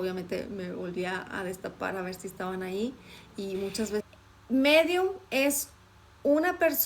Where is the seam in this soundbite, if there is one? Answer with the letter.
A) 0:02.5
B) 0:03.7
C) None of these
B